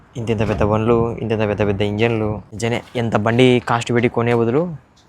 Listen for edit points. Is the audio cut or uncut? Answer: cut